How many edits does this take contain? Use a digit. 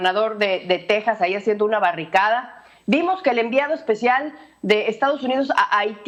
0